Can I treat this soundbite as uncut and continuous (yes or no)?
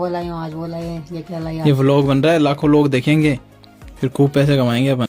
yes